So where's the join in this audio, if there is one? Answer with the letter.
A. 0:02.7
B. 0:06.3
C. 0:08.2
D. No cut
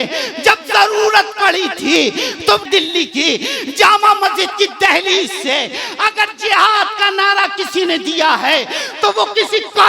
A